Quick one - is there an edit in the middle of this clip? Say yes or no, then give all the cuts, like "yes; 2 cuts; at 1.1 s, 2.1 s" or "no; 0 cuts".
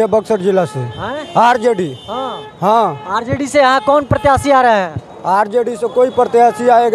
no; 0 cuts